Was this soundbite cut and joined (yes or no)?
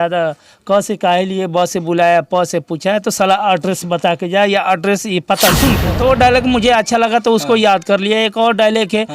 yes